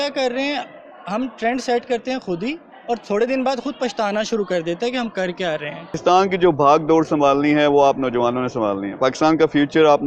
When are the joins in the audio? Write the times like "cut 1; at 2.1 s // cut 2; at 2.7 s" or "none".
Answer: cut 1; at 5.9 s

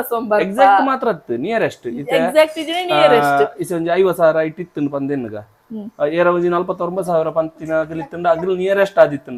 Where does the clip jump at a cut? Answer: none

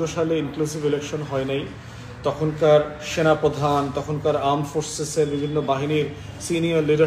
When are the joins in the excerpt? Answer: none

